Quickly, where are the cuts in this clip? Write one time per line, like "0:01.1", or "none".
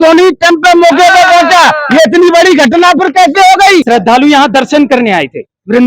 0:03.8